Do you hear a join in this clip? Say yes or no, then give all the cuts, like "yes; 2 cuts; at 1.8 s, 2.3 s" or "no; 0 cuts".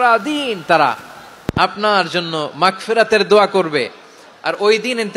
no; 0 cuts